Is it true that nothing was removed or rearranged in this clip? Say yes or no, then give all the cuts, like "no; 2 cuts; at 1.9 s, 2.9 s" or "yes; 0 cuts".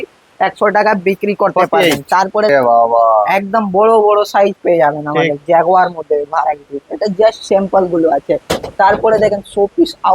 no; 1 cut; at 2.5 s